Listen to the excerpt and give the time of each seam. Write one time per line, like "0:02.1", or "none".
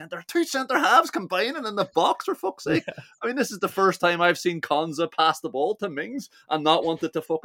none